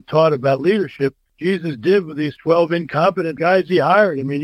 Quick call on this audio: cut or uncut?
cut